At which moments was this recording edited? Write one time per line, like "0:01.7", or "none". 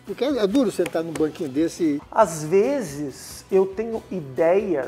0:02.0